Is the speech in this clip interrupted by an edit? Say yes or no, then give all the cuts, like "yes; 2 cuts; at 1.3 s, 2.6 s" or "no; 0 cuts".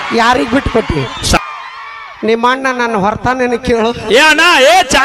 yes; 1 cut; at 1.4 s